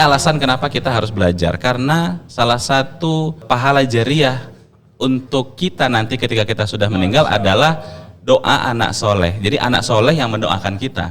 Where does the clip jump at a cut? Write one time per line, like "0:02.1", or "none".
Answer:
0:03.4